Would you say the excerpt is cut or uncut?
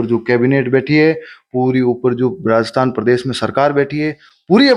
uncut